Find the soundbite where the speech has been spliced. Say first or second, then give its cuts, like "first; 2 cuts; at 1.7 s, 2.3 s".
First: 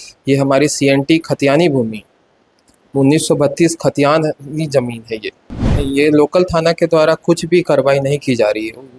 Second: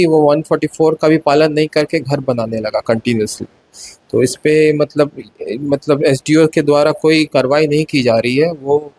first; 1 cut; at 5.6 s